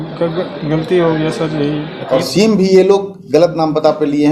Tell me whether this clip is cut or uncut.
cut